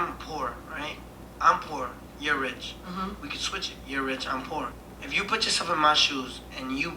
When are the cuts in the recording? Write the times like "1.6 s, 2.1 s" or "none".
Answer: 4.8 s